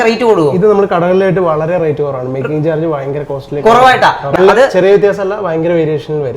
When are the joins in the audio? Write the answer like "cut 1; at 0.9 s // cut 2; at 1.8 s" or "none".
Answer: cut 1; at 4.4 s